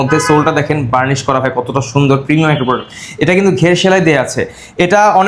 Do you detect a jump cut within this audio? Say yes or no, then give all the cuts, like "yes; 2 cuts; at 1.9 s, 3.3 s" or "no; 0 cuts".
no; 0 cuts